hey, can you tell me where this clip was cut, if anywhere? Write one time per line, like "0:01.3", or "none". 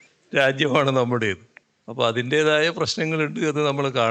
none